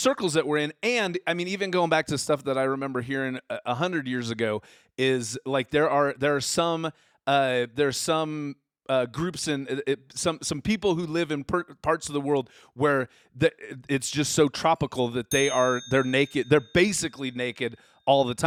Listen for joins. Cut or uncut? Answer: uncut